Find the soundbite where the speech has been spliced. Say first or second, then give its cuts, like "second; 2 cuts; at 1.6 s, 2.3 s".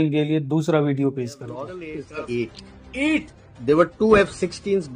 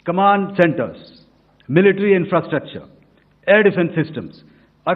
first; 1 cut; at 1.8 s